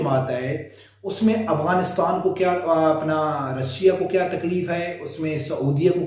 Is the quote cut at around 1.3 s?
no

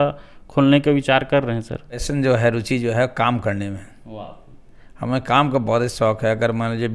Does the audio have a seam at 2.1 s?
yes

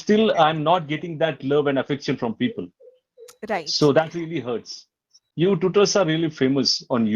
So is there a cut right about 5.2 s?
yes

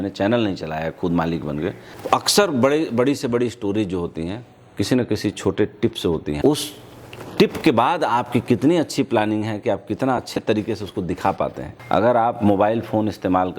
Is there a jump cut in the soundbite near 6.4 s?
yes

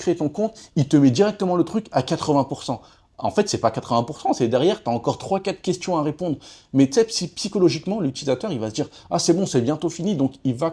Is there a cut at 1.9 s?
no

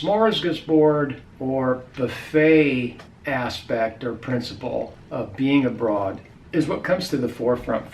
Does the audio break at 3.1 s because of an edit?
yes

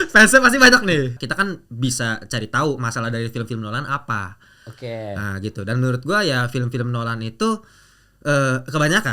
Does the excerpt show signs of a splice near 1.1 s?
yes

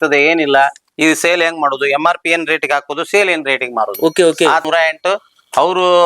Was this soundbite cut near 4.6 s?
yes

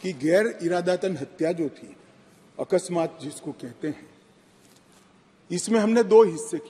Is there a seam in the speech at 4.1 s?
no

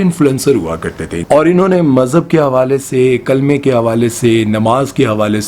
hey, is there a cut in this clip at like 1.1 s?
yes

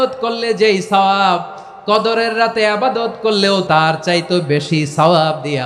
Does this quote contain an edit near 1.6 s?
no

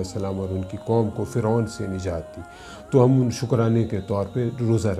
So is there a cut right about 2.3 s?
no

